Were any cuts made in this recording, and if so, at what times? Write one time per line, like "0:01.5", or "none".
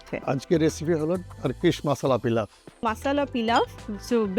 0:02.8